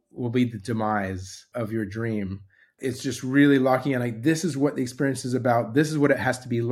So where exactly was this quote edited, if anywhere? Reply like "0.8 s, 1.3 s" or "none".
1.5 s, 2.7 s